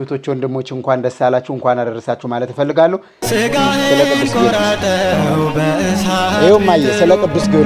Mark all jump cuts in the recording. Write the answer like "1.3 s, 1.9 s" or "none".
3.2 s